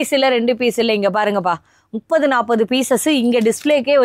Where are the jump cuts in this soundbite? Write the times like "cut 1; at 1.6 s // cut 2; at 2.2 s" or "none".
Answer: none